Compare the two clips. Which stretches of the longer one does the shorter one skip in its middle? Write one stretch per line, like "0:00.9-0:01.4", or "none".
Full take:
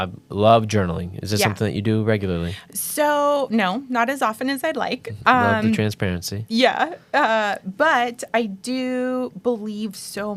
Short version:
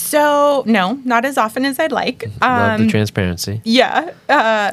none